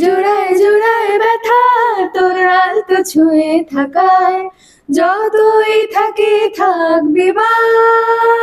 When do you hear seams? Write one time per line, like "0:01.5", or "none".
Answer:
none